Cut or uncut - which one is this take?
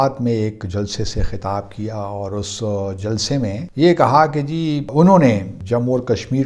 cut